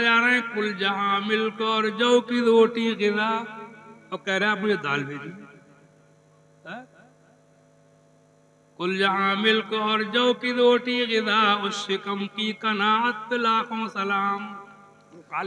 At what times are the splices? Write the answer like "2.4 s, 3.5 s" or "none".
none

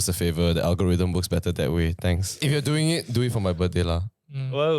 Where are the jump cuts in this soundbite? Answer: 2.4 s

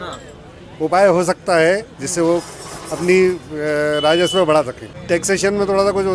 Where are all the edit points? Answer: 4.9 s

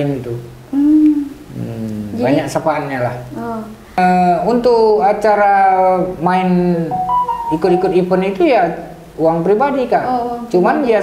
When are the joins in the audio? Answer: 4.0 s

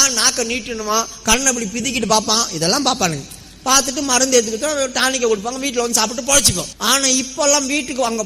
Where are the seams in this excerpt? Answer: 6.7 s

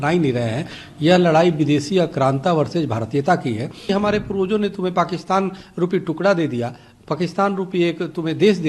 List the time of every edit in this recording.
3.9 s

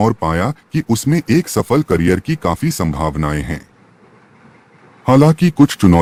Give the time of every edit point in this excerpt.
none

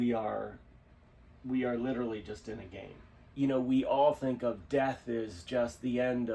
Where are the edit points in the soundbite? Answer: 3.2 s

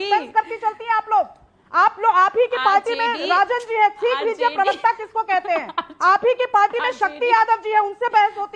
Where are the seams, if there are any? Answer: none

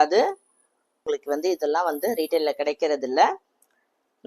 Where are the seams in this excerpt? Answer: 1.1 s

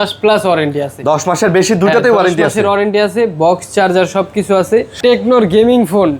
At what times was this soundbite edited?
4.9 s

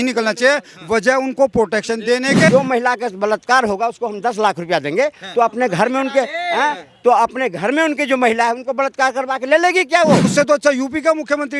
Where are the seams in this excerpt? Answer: 2.5 s, 10.3 s

